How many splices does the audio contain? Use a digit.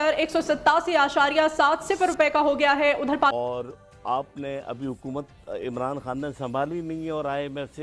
1